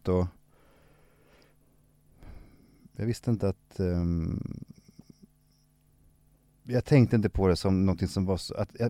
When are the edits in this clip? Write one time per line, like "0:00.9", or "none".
0:06.3